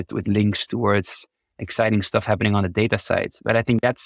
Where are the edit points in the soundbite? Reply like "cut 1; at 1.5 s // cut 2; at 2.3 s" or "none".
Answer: none